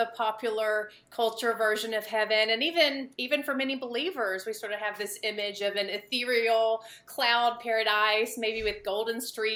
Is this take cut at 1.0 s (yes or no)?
no